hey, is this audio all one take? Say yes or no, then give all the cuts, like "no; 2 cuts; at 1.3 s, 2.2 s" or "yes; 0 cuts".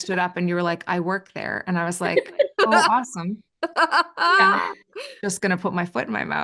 yes; 0 cuts